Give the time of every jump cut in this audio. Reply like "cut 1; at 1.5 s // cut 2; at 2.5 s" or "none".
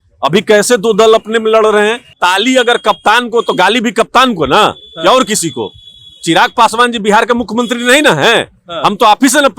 cut 1; at 2.2 s